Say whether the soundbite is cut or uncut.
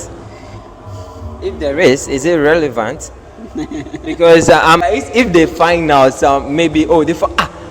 cut